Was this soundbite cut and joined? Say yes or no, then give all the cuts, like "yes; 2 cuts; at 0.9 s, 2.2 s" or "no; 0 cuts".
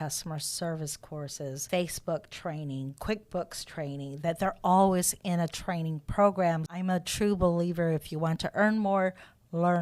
yes; 2 cuts; at 1.6 s, 6.7 s